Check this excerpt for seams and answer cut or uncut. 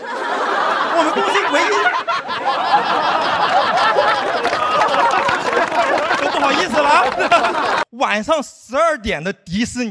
cut